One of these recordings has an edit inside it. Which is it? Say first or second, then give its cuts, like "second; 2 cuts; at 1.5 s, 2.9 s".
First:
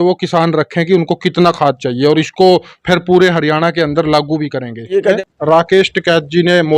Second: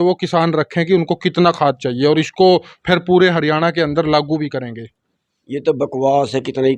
first; 1 cut; at 5.2 s